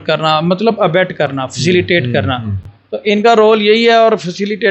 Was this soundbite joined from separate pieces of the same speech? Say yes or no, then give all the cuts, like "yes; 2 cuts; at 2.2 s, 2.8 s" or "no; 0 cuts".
no; 0 cuts